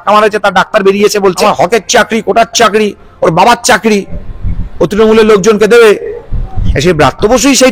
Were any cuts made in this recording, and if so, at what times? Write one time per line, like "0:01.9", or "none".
0:01.4